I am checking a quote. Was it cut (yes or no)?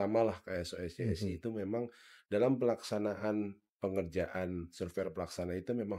no